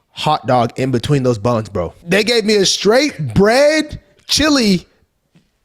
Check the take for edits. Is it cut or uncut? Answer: cut